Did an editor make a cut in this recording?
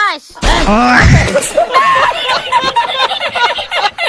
no; 0 cuts

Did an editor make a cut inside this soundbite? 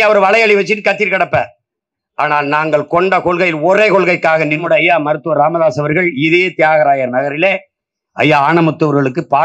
yes; 1 cut; at 4.6 s

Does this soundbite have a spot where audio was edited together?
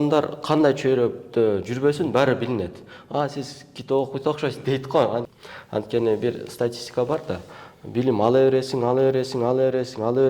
yes; 1 cut; at 5.3 s

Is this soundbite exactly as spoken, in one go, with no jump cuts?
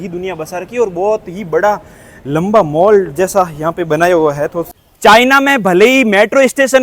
no; 1 cut; at 4.6 s

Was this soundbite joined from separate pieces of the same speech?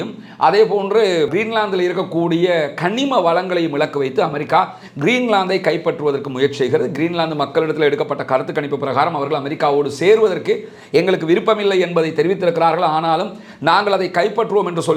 no; 0 cuts

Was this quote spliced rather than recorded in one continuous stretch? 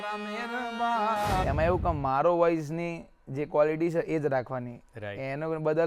yes; 1 cut; at 1.4 s

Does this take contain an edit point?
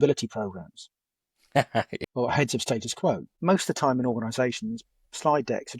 yes; 2 cuts; at 2.0 s, 3.3 s

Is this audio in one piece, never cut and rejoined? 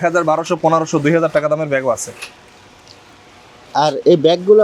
yes; 0 cuts

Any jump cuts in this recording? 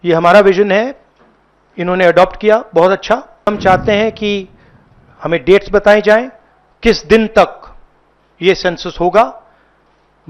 yes; 1 cut; at 3.5 s

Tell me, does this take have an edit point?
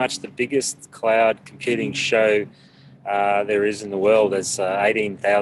yes; 1 cut; at 2.0 s

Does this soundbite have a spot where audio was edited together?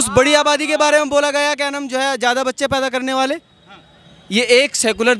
no; 0 cuts

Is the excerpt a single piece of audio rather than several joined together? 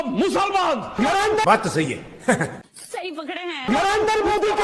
yes; 0 cuts

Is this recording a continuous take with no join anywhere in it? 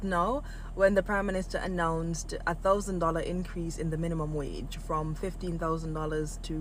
yes; 0 cuts

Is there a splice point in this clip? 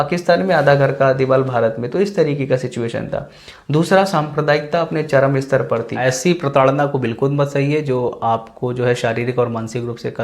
yes; 1 cut; at 6.0 s

